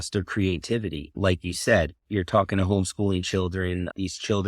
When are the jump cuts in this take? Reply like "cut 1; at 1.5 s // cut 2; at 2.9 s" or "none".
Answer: cut 1; at 1.2 s // cut 2; at 2.0 s

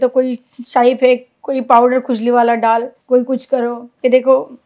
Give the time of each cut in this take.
cut 1; at 2.9 s

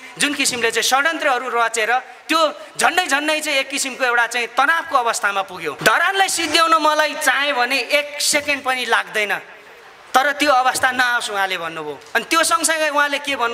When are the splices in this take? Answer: cut 1; at 5.8 s

